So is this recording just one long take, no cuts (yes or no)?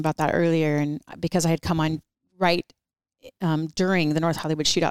yes